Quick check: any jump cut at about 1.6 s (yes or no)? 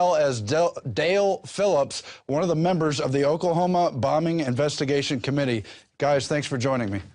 no